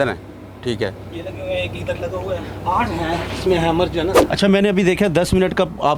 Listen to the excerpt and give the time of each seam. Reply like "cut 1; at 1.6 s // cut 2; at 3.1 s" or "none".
cut 1; at 4.2 s